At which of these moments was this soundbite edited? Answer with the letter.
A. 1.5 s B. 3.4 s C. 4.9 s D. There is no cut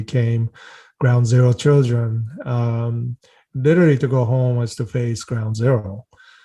B